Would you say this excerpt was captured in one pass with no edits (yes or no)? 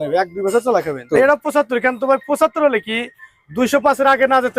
no